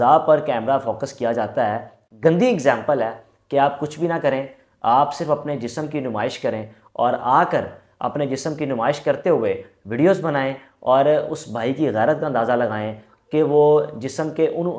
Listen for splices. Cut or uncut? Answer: cut